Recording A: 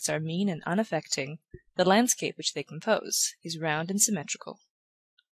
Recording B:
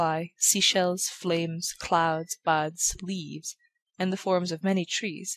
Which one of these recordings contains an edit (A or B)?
B